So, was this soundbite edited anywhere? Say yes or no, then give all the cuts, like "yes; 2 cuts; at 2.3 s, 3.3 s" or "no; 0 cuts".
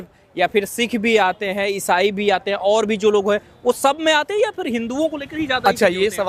no; 0 cuts